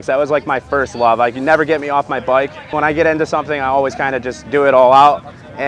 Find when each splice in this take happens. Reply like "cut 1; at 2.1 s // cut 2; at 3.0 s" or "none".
cut 1; at 2.7 s